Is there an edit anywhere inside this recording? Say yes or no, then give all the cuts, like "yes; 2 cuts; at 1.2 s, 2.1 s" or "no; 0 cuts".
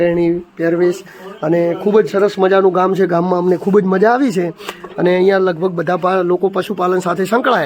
no; 0 cuts